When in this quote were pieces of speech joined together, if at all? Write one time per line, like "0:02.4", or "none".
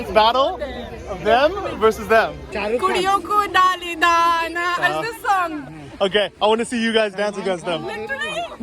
0:02.5